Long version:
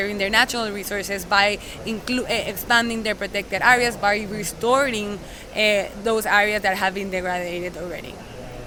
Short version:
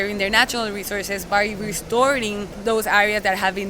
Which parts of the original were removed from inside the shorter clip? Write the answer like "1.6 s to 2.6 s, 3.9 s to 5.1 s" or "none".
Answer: 1.2 s to 4.0 s, 5.3 s to 5.9 s